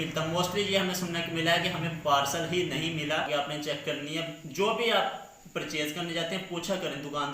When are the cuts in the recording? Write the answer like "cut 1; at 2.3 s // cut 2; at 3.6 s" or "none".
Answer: cut 1; at 3.3 s